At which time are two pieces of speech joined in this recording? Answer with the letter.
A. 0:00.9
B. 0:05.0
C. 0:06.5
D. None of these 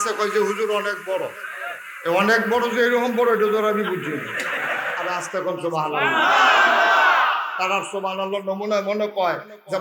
B